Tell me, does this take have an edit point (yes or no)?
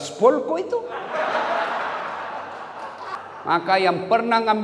yes